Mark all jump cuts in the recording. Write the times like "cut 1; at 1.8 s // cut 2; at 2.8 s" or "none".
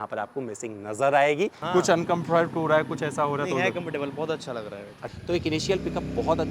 cut 1; at 1.6 s // cut 2; at 5.0 s